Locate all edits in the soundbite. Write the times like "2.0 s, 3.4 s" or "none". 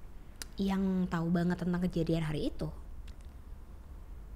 none

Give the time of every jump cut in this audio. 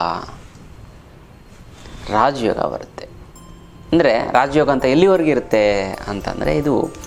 none

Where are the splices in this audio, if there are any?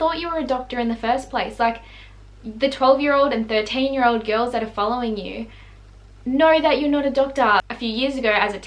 none

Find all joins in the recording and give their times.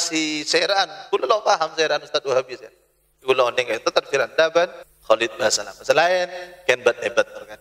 4.9 s

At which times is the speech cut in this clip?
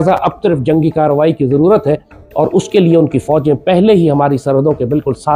none

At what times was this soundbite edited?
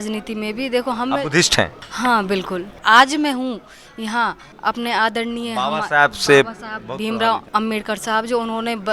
1.8 s, 2.8 s, 4.5 s, 7.4 s

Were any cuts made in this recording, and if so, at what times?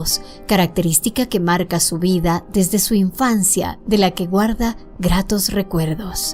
3.0 s

